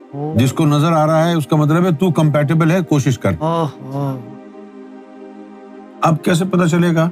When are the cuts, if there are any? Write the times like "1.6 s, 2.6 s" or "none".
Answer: 4.2 s, 6.0 s